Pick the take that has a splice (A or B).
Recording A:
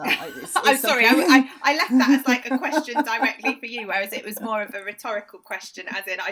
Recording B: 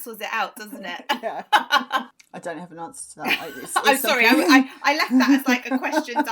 B